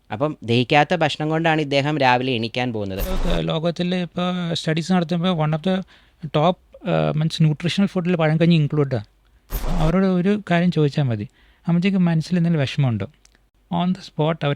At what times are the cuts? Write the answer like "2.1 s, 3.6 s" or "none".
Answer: 3.2 s, 9.6 s